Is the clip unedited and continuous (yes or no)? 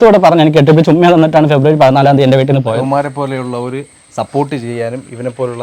no